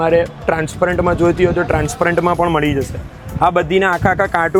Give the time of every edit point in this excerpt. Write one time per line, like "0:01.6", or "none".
none